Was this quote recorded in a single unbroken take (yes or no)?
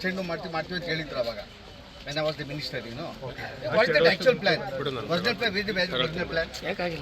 yes